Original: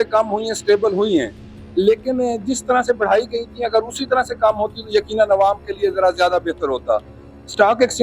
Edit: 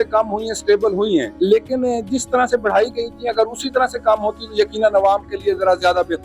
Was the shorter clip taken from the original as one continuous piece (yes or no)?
no